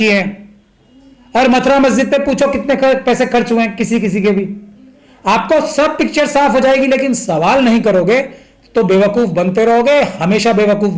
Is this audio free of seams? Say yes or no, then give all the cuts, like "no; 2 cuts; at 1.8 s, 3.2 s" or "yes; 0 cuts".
yes; 0 cuts